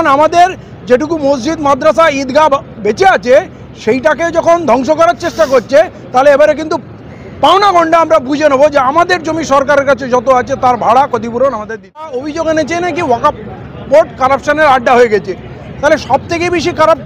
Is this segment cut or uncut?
cut